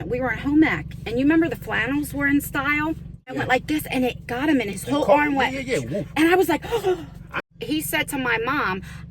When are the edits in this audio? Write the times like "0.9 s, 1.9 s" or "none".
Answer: 3.3 s, 7.3 s